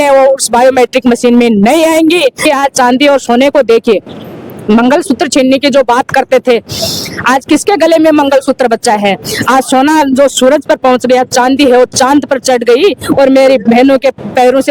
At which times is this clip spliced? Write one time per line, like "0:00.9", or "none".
0:02.4